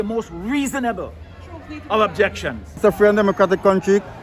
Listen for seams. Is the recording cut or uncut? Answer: cut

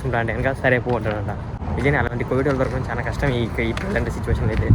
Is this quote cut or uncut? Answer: cut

